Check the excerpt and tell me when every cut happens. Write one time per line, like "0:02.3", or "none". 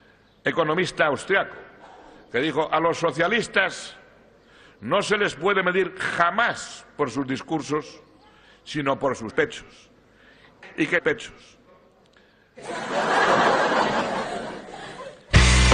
none